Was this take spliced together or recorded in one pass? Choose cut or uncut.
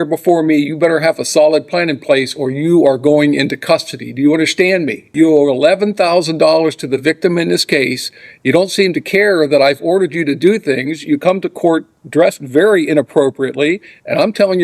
cut